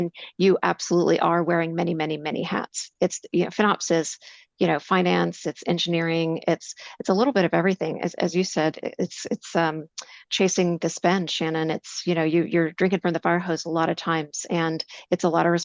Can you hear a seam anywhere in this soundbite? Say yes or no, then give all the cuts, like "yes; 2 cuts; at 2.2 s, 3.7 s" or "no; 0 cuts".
no; 0 cuts